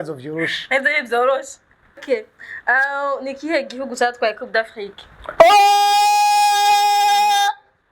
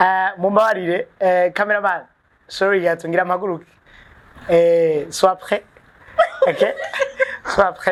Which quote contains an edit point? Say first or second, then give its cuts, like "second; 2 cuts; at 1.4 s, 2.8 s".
first; 1 cut; at 2.0 s